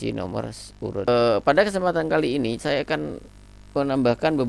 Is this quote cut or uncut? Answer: cut